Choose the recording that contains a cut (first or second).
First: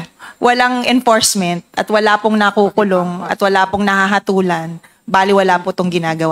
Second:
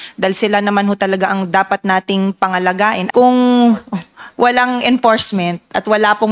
second